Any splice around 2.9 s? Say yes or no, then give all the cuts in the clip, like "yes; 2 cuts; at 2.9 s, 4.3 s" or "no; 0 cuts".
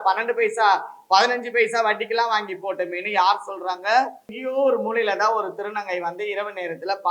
no; 1 cut; at 4.4 s